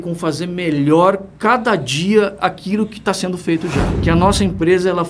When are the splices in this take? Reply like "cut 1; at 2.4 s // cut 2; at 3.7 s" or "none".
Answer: cut 1; at 3.9 s